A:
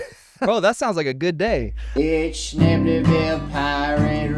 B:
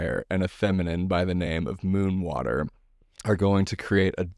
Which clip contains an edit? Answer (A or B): A